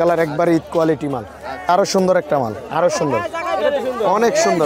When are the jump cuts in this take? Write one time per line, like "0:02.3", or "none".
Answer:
0:01.7